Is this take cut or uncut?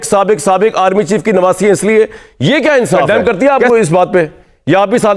cut